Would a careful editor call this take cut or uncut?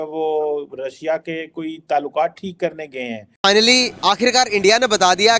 cut